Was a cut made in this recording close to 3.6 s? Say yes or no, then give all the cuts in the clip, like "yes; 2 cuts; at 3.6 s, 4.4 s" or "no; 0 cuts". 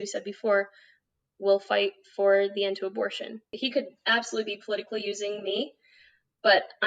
yes; 1 cut; at 3.6 s